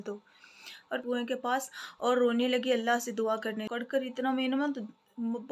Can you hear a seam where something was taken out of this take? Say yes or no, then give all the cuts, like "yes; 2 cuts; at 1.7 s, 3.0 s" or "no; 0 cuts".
yes; 2 cuts; at 0.9 s, 3.6 s